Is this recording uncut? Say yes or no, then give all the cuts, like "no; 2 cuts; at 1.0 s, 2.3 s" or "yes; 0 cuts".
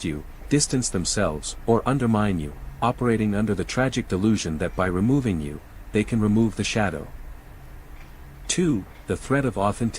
no; 1 cut; at 1.5 s